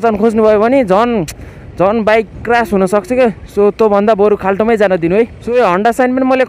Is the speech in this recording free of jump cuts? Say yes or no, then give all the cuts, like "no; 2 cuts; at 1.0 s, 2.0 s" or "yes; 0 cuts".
yes; 0 cuts